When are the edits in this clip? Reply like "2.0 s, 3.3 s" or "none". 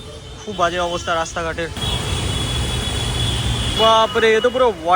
1.7 s, 3.7 s